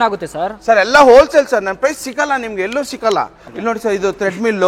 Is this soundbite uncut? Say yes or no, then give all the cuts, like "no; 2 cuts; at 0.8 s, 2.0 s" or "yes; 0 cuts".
no; 1 cut; at 3.5 s